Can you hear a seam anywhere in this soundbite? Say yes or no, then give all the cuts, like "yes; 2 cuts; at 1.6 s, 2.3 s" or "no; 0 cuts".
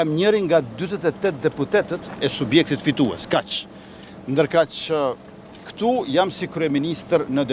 no; 0 cuts